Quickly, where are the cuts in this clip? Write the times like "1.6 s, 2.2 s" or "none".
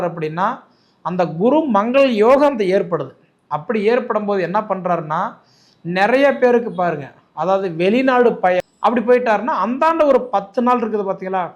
8.7 s